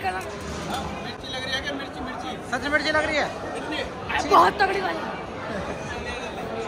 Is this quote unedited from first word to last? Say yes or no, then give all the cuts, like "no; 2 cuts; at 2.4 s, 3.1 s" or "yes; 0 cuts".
yes; 0 cuts